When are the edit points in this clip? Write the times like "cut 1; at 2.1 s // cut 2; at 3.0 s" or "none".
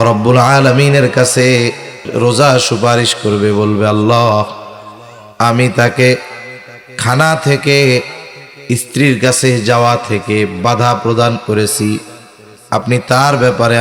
cut 1; at 2.0 s